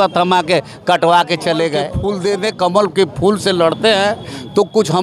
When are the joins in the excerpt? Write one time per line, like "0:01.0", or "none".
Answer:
0:02.0